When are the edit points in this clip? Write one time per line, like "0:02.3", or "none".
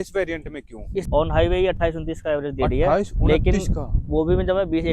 0:01.1